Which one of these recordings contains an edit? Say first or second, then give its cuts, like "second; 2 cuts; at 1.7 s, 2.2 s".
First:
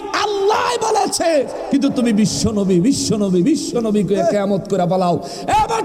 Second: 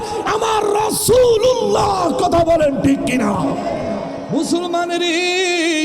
second; 1 cut; at 4.3 s